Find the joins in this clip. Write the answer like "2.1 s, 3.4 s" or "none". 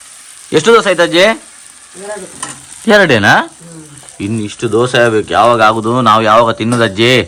none